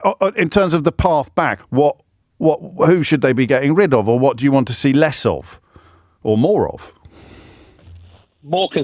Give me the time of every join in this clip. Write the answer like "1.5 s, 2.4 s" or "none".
1.5 s